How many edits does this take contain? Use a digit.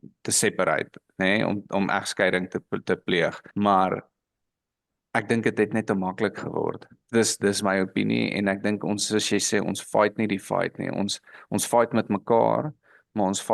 0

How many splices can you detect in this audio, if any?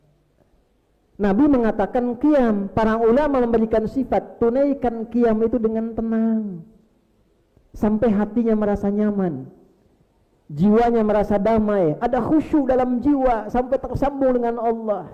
0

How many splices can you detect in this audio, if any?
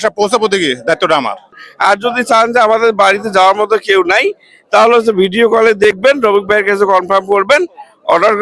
1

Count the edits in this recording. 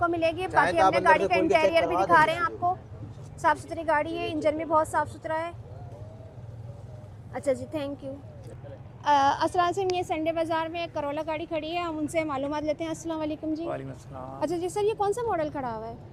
0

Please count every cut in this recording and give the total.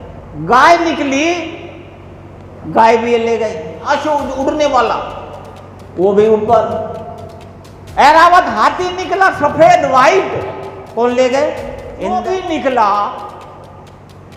2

